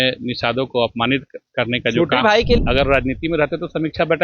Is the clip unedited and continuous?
no; 1 cut; at 2.6 s

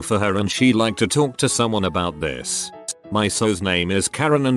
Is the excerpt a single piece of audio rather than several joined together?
yes; 0 cuts

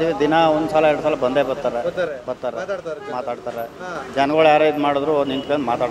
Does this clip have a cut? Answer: no; 0 cuts

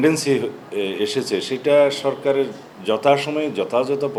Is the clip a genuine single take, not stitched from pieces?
yes; 0 cuts

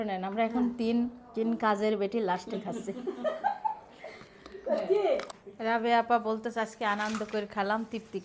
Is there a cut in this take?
yes; 1 cut; at 5.4 s

